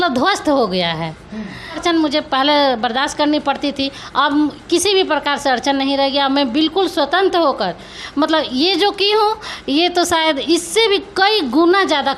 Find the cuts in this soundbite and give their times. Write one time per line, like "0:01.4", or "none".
0:01.8